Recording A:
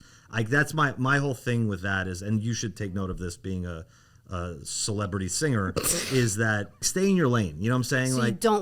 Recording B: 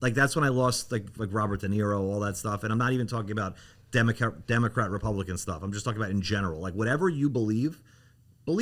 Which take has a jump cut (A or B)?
A